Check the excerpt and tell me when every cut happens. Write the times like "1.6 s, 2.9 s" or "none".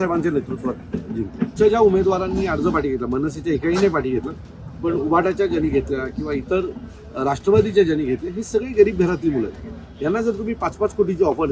1.5 s

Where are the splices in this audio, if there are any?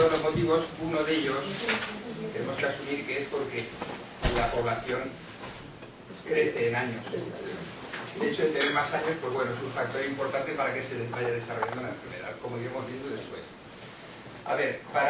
6.7 s

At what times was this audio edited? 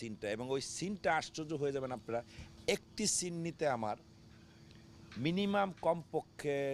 none

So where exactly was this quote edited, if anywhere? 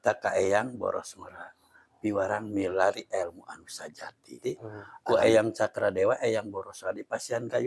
4.4 s

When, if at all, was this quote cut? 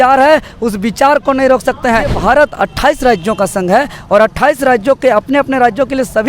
2.1 s

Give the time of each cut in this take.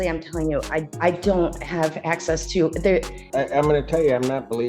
0.9 s, 3.2 s

